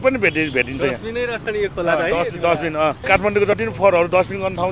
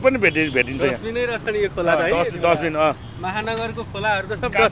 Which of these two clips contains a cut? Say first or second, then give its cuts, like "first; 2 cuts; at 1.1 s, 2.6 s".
first; 1 cut; at 3.0 s